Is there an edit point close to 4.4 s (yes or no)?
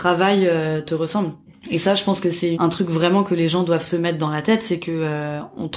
no